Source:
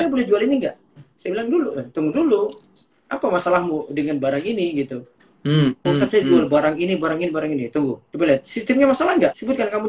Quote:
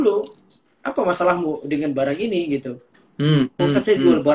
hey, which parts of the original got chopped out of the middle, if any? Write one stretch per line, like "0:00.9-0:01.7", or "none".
none